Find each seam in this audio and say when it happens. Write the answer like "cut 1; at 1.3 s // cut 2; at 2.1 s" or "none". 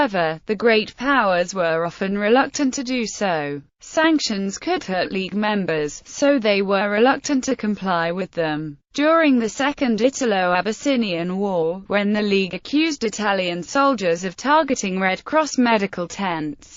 cut 1; at 7.7 s